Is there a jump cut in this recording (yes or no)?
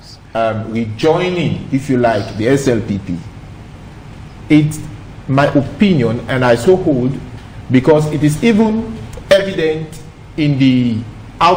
no